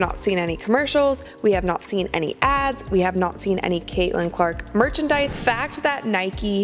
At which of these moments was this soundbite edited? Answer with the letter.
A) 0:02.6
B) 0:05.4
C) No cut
B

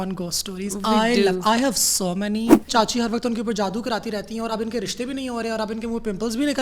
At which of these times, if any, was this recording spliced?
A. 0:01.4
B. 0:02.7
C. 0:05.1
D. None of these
B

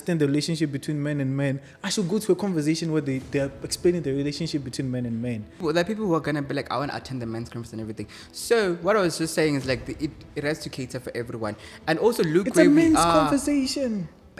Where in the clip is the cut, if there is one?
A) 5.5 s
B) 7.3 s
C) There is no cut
A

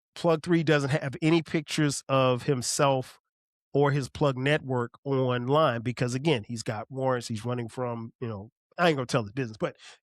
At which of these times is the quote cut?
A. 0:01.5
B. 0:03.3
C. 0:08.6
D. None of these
C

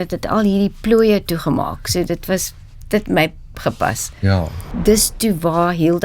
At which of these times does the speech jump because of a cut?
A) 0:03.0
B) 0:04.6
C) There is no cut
B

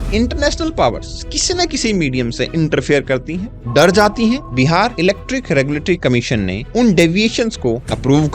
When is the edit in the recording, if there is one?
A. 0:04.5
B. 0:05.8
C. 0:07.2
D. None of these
A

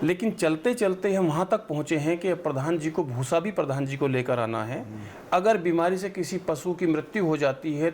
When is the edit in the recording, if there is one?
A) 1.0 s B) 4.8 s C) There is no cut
C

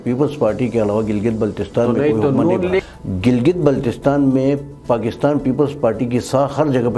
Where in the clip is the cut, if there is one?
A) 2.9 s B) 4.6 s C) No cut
A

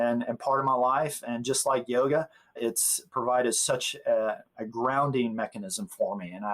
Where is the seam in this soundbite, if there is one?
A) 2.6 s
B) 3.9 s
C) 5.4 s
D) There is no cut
A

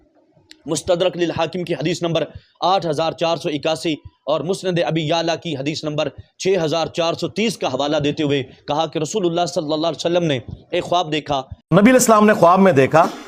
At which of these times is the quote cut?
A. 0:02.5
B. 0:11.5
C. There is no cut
B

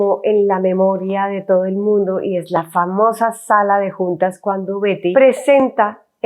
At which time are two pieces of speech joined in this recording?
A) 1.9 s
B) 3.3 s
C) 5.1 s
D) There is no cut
C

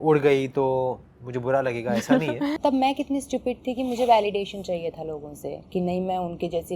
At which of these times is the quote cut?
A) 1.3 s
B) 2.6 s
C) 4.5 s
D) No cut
B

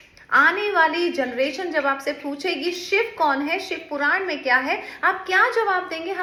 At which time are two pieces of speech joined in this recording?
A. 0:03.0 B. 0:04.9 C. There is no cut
C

